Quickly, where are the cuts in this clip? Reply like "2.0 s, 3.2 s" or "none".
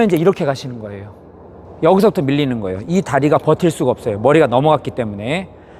none